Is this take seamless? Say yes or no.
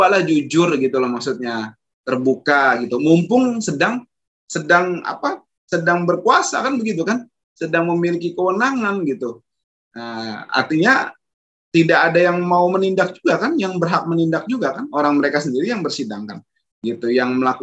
yes